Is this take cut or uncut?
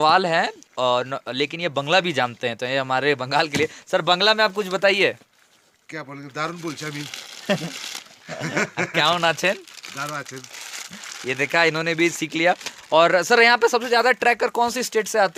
uncut